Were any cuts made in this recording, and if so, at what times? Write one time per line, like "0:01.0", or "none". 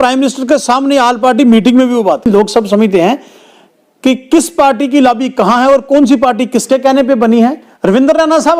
0:02.3
0:07.7